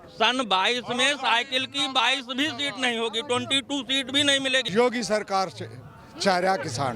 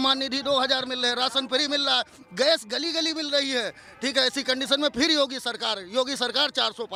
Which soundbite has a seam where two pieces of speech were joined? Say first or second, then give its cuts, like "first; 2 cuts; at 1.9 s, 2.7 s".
first; 1 cut; at 4.7 s